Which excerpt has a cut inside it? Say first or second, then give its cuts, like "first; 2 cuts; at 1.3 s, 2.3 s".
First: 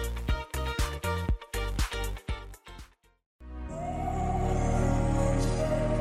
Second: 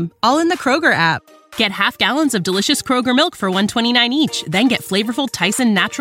first; 1 cut; at 3.2 s